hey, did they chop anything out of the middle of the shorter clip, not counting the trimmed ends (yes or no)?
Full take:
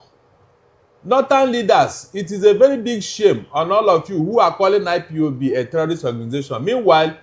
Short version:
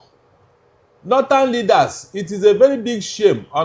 no